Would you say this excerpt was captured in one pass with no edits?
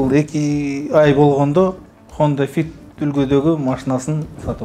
yes; 0 cuts

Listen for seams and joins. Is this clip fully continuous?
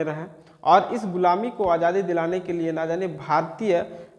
yes; 0 cuts

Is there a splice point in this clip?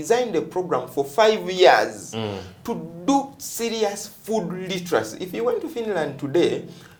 no; 0 cuts

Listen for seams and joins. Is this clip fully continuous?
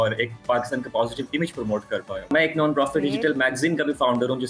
no; 1 cut; at 2.3 s

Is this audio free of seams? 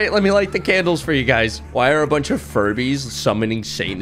no; 1 cut; at 1.6 s

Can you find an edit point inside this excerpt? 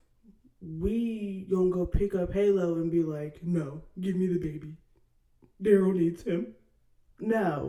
no; 0 cuts

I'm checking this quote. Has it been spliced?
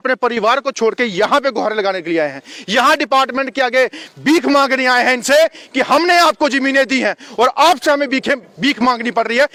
no; 0 cuts

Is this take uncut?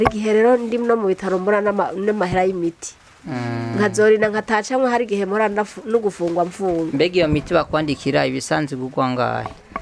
yes; 0 cuts

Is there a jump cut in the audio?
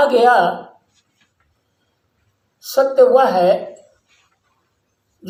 no; 0 cuts

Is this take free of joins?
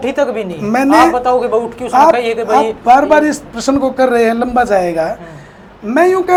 yes; 0 cuts

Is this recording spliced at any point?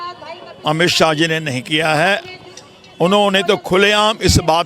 no; 0 cuts

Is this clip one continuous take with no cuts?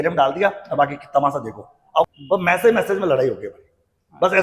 no; 1 cut; at 2.1 s

